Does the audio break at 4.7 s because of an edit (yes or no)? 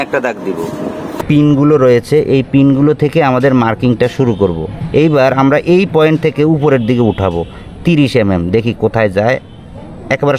yes